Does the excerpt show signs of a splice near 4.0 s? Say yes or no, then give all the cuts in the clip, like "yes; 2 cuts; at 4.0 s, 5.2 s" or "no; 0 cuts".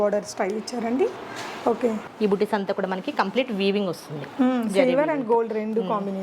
no; 1 cut; at 2.1 s